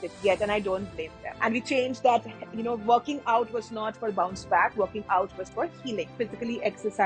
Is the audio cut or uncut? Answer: cut